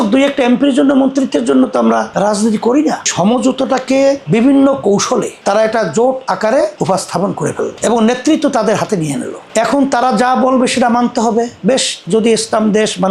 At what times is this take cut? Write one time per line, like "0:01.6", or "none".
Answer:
0:03.1
0:05.4
0:09.3